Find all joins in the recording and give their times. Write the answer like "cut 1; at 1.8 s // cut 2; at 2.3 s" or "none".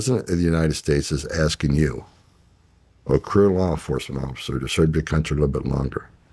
none